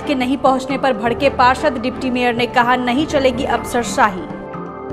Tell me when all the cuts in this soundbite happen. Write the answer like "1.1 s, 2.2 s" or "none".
none